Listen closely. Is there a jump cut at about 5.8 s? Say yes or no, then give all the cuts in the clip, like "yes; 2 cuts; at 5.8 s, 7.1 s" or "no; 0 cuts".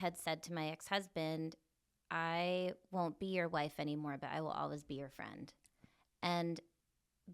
yes; 1 cut; at 5.8 s